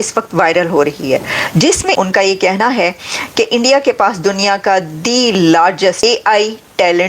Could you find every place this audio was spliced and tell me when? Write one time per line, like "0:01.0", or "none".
0:01.9
0:06.0